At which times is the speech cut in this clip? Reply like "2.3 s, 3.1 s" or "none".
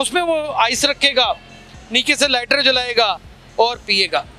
none